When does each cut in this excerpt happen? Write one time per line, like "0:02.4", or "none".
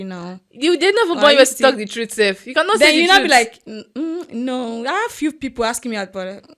none